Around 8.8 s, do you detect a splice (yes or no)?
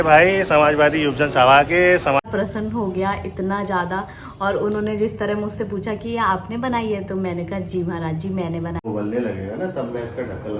yes